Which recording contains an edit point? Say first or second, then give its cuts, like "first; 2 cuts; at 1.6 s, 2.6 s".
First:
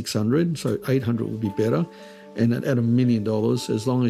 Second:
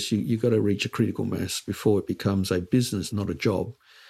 second; 1 cut; at 3.1 s